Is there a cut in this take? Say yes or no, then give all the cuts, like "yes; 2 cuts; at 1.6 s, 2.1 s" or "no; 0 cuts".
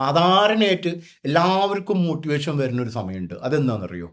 no; 0 cuts